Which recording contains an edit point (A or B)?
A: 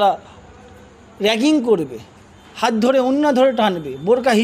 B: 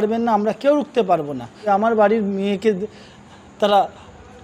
B